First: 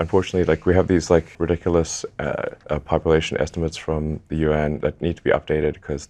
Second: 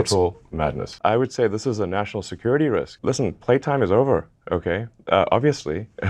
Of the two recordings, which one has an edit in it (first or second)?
second